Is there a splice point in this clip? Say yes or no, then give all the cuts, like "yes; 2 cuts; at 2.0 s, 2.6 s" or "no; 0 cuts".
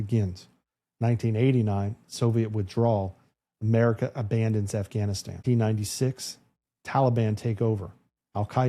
yes; 1 cut; at 5.4 s